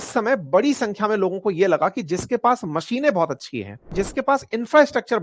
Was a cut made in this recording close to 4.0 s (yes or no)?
yes